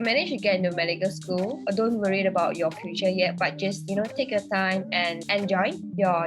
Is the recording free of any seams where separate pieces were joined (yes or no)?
no